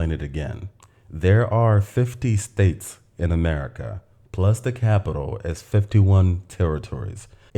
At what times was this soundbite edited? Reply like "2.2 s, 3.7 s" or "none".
none